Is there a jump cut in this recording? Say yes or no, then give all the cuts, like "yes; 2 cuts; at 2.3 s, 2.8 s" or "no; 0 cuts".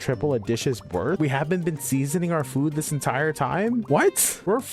yes; 2 cuts; at 1.2 s, 4.0 s